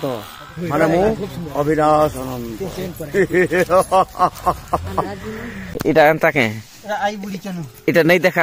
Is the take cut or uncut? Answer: cut